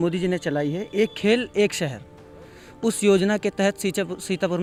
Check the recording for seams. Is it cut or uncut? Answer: uncut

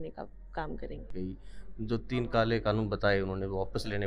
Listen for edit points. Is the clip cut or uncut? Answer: cut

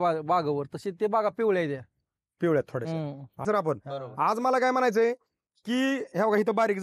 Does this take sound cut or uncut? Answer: cut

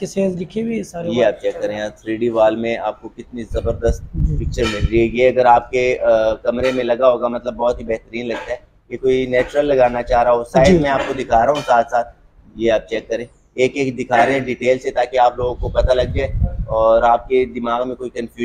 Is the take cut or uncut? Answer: uncut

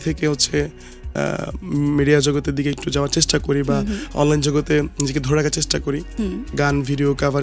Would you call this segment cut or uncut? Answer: uncut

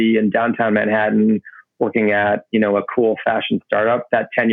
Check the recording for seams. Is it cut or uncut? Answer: uncut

